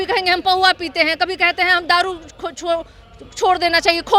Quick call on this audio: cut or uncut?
uncut